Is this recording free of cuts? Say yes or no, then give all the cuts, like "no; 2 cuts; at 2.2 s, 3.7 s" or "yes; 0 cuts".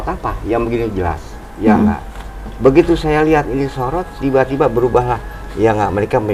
yes; 0 cuts